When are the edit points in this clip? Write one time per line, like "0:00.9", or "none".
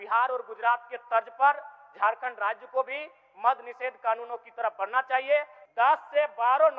0:05.6